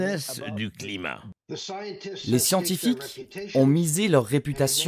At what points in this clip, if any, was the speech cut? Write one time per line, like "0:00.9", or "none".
0:01.3